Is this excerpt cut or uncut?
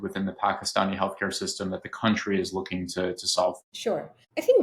uncut